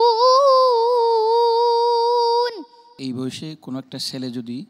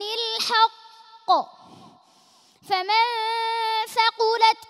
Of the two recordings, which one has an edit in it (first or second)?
first